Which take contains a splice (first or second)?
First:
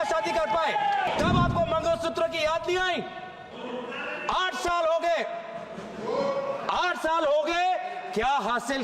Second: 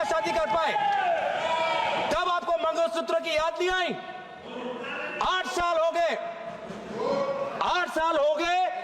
first